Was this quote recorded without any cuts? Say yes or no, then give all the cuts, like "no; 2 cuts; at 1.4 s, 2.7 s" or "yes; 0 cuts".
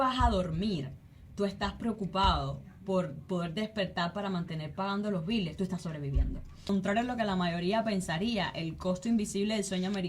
no; 1 cut; at 6.7 s